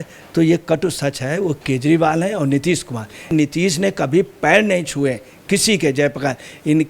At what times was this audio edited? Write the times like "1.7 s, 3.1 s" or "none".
3.3 s